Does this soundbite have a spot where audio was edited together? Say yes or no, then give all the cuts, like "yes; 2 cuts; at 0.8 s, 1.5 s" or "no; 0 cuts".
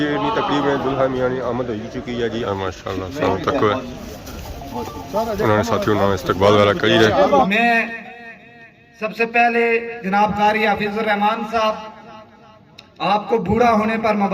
yes; 2 cuts; at 2.4 s, 7.5 s